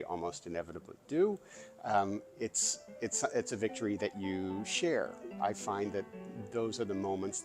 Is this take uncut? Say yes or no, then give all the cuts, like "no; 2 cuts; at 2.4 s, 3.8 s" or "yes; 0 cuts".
no; 1 cut; at 5.3 s